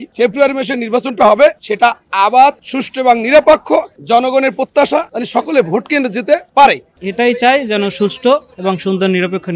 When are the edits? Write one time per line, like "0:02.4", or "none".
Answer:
0:06.9